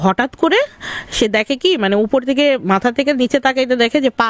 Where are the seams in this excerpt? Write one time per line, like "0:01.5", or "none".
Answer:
none